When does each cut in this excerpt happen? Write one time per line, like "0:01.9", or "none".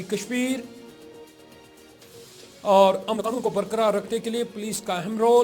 0:03.5

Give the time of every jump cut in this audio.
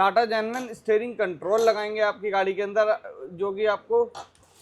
none

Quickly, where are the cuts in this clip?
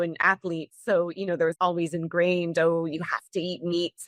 0:01.5

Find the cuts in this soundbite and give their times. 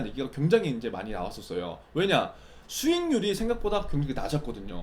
none

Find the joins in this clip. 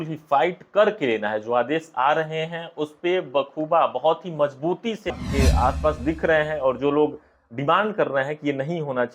0:05.2

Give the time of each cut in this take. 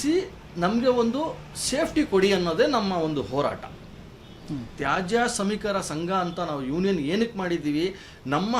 none

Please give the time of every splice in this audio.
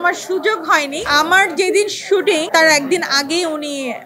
0:01.1
0:02.5

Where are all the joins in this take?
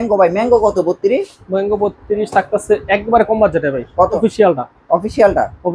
0:04.2

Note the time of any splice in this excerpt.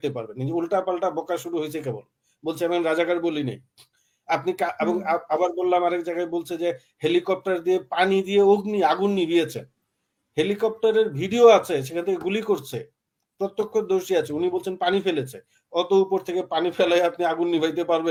none

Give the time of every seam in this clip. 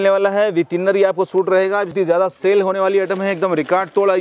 0:01.9

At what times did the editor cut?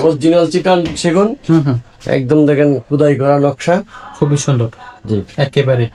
none

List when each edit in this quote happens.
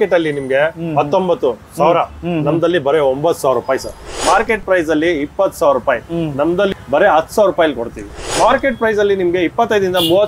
0:04.2
0:06.7
0:08.2

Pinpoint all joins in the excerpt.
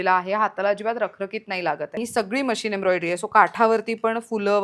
0:02.0

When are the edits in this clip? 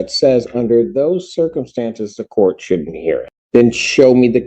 0:03.3

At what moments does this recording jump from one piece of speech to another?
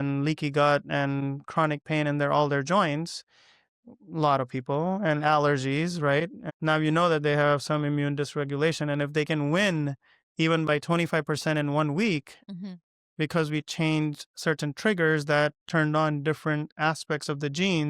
0:06.4

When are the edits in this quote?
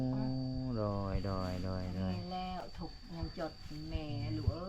none

